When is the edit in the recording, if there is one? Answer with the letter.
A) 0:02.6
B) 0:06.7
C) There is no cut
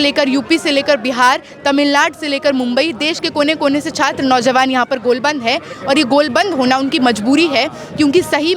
C